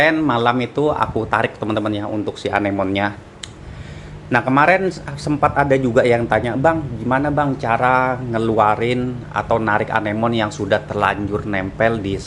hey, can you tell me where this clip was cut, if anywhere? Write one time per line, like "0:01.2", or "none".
none

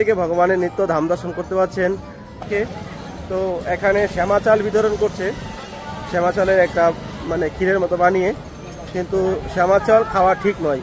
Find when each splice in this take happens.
0:02.4

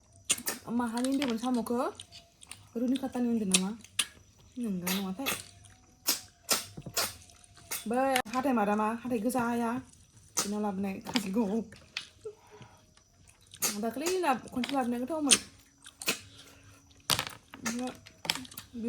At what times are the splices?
0:08.2

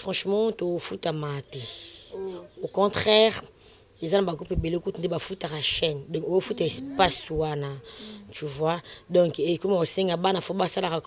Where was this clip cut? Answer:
none

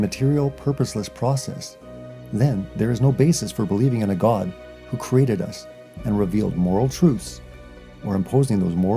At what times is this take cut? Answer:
0:07.4

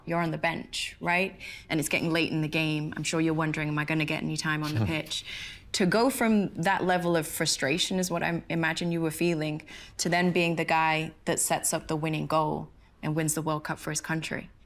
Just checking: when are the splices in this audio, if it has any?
none

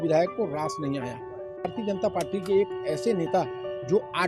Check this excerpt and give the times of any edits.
0:01.7

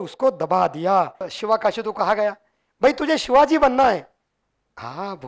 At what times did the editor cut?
0:01.3

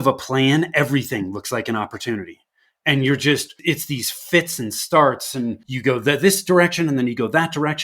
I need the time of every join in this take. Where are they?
0:03.6
0:05.7

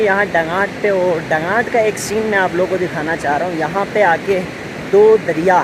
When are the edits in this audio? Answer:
none

